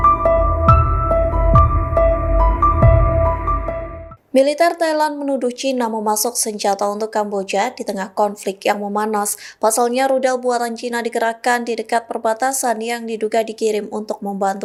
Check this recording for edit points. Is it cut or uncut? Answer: uncut